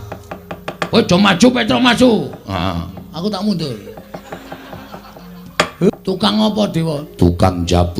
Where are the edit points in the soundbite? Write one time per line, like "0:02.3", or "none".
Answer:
0:05.9